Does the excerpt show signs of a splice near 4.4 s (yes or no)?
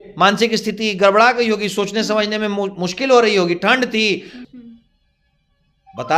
yes